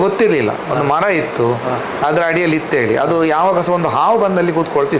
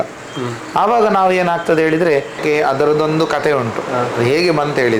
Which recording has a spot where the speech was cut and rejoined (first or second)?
second